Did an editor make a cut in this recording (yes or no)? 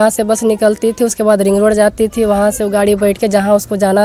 no